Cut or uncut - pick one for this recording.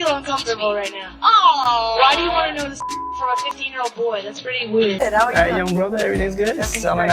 cut